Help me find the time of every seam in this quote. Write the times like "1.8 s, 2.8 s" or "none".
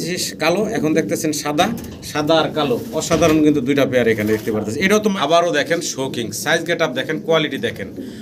5.2 s